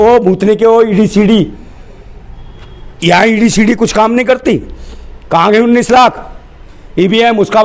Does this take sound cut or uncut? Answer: uncut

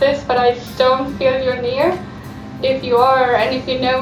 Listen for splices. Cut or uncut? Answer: cut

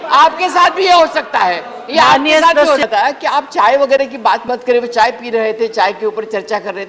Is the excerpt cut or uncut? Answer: cut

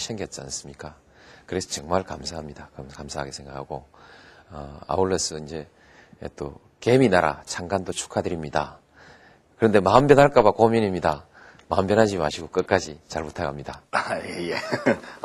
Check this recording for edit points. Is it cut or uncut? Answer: cut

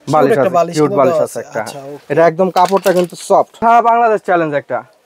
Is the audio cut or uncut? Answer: cut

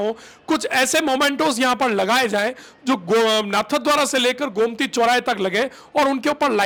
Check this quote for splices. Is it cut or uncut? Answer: uncut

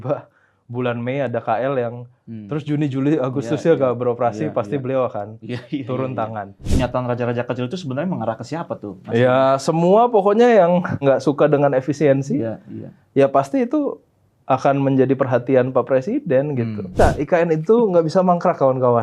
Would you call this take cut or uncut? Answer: cut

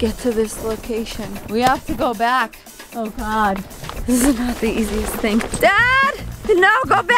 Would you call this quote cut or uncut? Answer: cut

